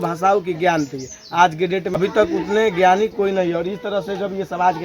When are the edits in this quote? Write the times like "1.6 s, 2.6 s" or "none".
2.0 s